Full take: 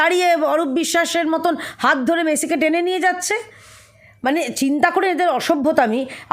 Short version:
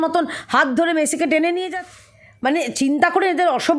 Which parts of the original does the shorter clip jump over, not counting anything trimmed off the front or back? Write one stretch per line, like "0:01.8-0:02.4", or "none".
0:03.1-0:03.6